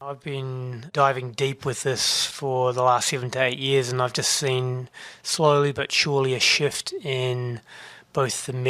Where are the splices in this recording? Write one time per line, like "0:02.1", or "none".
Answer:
0:00.9